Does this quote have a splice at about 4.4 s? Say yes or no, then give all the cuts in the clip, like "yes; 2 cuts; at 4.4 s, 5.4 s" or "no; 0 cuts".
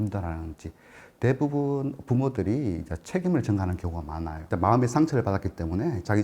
yes; 1 cut; at 4.4 s